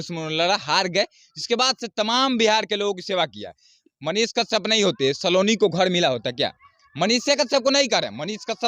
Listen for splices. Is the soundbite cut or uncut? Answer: uncut